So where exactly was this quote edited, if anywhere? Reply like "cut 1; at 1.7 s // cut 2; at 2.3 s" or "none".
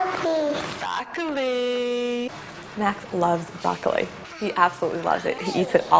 cut 1; at 4.3 s